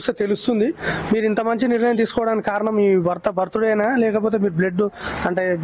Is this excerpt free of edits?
yes; 0 cuts

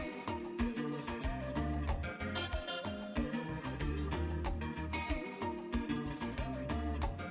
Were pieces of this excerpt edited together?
yes; 1 cut; at 2.6 s

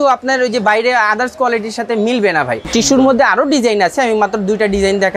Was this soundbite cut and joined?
yes; 1 cut; at 2.6 s

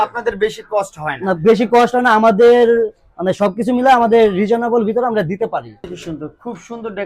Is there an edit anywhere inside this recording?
yes; 1 cut; at 5.9 s

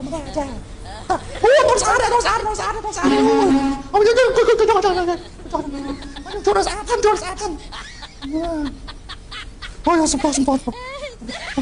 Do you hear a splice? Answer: no; 0 cuts

